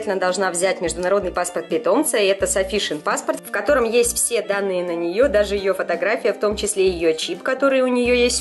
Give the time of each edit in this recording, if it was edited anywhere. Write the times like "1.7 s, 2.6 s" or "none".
none